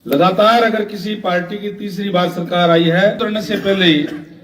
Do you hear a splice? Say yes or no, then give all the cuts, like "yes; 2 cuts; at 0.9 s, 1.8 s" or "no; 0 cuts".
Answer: yes; 1 cut; at 3.2 s